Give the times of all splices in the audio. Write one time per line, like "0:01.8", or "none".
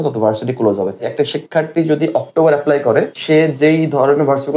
0:01.1
0:03.2